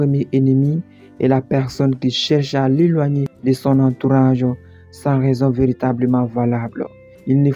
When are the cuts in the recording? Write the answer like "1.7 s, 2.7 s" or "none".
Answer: none